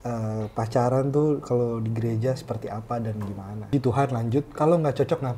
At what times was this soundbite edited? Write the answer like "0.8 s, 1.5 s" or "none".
3.7 s